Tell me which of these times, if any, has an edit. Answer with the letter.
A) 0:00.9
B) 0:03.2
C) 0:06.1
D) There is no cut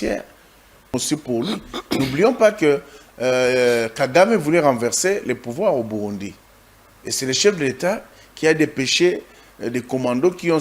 A